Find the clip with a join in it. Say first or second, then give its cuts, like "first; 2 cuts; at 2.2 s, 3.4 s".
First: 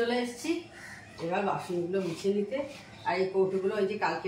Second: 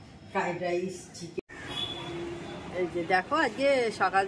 second; 1 cut; at 1.4 s